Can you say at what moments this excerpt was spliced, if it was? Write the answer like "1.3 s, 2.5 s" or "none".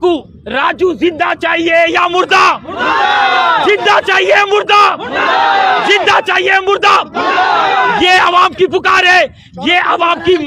none